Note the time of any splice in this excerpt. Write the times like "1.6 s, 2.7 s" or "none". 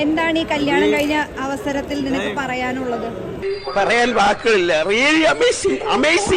none